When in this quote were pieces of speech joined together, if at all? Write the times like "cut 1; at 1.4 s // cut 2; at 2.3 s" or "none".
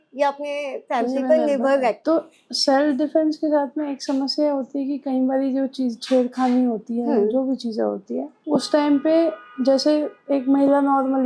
cut 1; at 2.0 s // cut 2; at 8.3 s

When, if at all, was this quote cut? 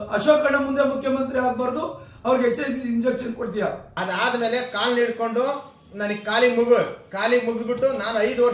cut 1; at 3.9 s

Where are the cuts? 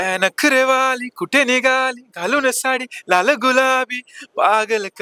none

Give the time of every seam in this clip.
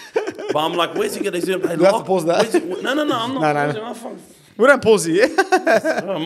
none

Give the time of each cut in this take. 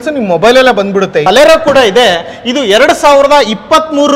cut 1; at 1.3 s

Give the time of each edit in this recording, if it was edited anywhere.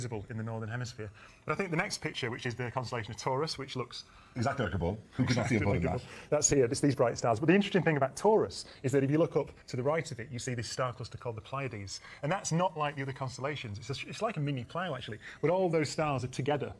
cut 1; at 7.7 s

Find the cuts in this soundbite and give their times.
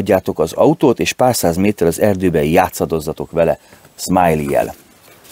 none

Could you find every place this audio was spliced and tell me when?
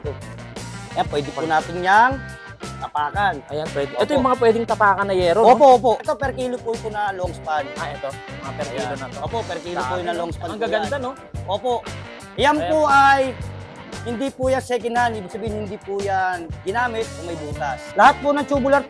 cut 1; at 6.0 s // cut 2; at 17.8 s

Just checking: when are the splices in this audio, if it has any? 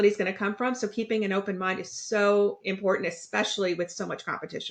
none

